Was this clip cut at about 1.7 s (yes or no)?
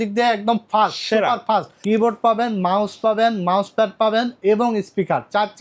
yes